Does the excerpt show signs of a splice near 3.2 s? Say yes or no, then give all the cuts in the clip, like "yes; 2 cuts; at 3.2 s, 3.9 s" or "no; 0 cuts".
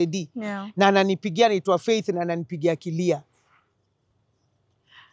no; 0 cuts